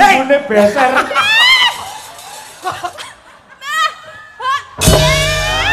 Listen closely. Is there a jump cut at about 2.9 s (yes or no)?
yes